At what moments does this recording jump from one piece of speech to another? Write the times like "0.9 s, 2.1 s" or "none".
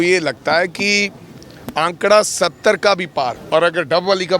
3.4 s